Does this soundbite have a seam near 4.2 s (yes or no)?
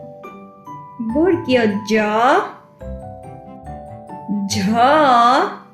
yes